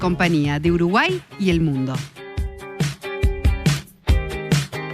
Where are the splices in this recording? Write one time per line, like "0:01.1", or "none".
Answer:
0:02.0